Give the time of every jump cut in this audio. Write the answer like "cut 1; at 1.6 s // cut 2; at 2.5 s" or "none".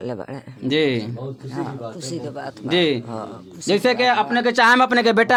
none